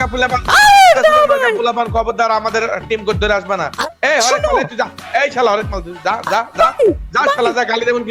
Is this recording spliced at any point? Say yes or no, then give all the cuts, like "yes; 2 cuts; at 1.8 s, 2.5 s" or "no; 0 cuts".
no; 0 cuts